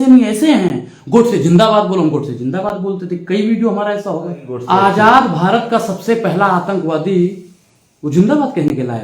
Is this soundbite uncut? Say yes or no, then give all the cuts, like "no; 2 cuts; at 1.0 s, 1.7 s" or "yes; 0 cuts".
no; 1 cut; at 4.5 s